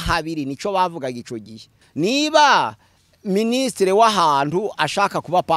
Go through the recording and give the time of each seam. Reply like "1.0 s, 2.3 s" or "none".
1.8 s